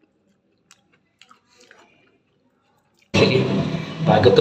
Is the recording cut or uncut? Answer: cut